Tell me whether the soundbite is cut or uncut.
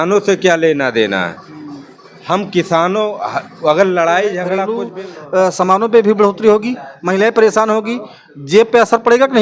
cut